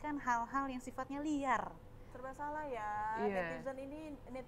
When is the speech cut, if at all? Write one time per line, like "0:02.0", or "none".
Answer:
0:02.2